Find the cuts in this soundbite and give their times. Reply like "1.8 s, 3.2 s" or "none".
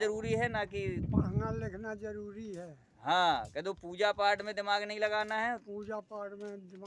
none